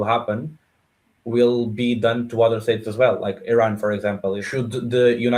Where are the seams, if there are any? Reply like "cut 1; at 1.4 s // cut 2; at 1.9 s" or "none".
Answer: cut 1; at 4.4 s